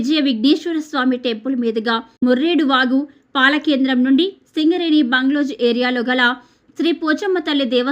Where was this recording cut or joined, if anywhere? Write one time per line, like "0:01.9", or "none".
0:02.1